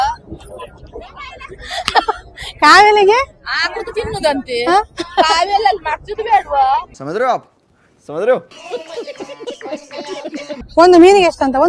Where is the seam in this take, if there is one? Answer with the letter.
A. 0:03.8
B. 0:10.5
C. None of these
B